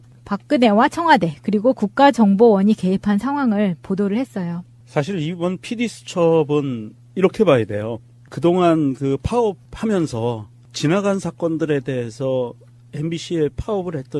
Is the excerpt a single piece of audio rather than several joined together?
no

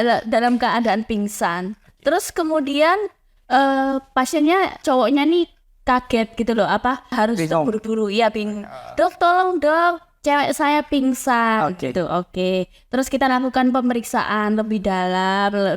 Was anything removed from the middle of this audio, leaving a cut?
yes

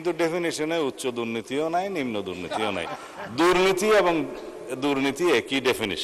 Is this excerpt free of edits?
yes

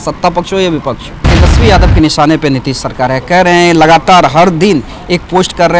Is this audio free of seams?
no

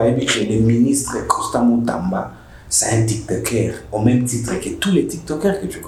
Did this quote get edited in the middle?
no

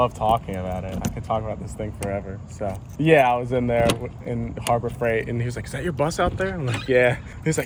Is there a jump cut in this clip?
no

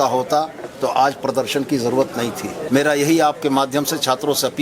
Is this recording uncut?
no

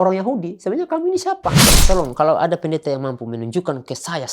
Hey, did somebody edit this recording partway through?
yes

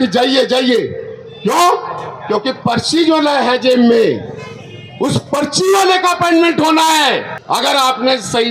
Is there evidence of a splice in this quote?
yes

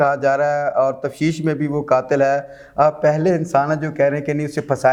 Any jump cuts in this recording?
no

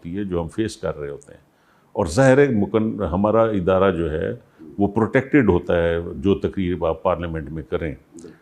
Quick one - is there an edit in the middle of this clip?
no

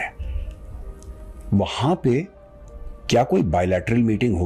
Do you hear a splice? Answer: no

